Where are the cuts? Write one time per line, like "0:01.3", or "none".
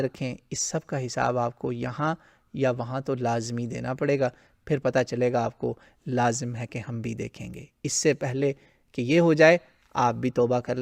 none